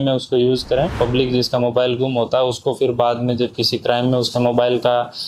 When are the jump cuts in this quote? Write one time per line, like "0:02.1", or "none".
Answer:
0:00.9